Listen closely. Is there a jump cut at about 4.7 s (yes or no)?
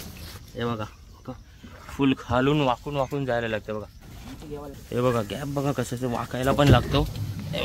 yes